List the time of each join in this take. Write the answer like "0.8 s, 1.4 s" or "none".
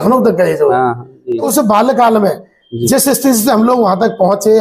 1.5 s